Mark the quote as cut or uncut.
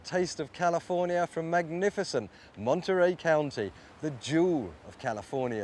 cut